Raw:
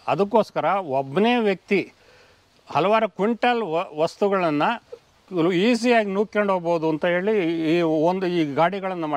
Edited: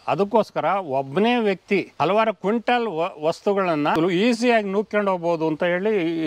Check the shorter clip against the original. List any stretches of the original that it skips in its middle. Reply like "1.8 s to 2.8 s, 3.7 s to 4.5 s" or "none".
1.9 s to 2.7 s, 4.7 s to 5.4 s